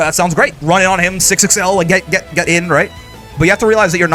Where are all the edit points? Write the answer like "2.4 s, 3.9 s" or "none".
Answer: none